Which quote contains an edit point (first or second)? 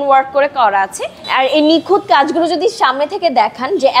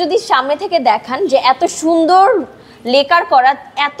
first